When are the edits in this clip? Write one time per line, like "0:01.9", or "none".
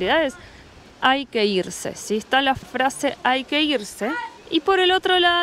none